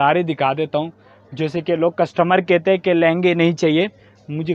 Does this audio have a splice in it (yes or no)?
no